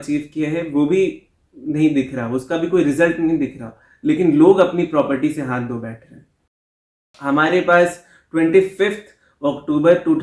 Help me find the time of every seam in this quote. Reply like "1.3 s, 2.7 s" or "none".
6.6 s